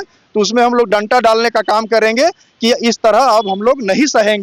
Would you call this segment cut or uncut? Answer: uncut